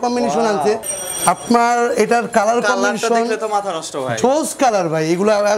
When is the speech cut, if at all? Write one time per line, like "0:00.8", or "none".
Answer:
0:00.9